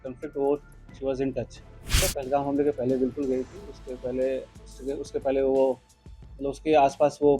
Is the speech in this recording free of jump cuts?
no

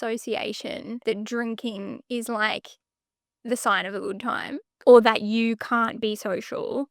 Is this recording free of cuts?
no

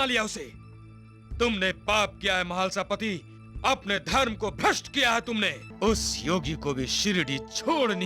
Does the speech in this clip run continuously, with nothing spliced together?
no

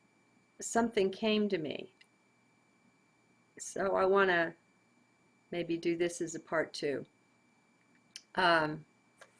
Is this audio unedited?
no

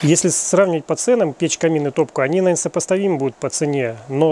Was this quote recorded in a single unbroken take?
yes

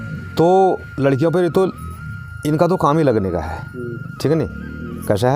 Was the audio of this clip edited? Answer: no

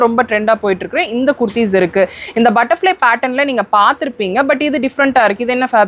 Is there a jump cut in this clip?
no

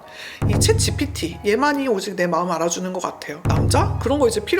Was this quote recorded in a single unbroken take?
no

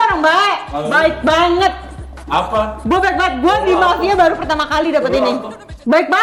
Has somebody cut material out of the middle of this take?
no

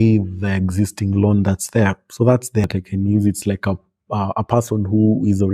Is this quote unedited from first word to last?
no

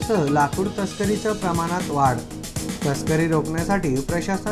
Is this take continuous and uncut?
yes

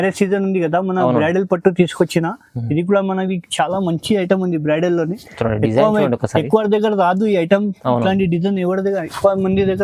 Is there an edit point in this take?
no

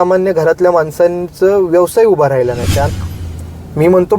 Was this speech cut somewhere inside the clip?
yes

